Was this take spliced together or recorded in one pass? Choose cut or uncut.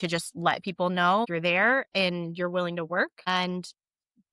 cut